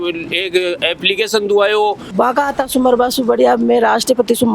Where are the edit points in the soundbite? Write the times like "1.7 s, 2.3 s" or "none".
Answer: 2.1 s

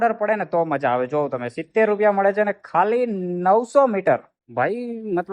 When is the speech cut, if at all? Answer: 4.4 s

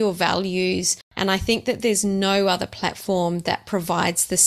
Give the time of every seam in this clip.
1.0 s

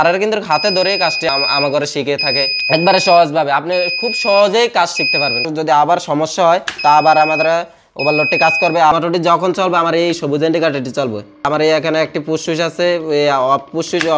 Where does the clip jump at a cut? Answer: 1.3 s, 2.6 s, 5.5 s, 8.9 s, 11.5 s

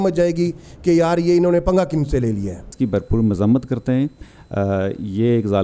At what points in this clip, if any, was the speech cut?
2.6 s

